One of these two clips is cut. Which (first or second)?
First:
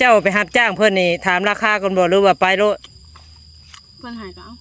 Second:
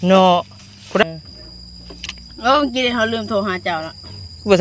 second